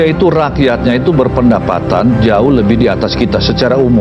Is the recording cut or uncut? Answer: uncut